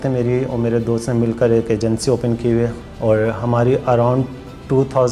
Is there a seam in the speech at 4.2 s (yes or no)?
no